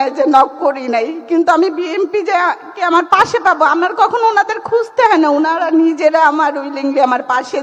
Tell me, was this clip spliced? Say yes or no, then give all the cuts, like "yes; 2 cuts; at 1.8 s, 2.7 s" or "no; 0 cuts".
no; 0 cuts